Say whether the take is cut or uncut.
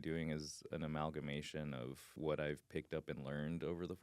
cut